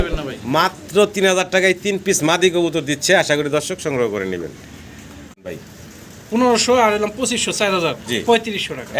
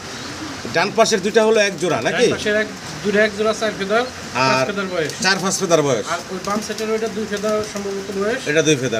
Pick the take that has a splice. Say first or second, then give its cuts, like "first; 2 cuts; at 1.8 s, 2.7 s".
first; 1 cut; at 5.4 s